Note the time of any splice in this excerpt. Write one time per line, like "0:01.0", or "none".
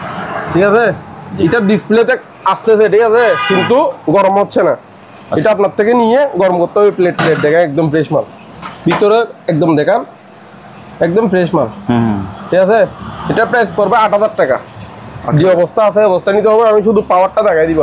none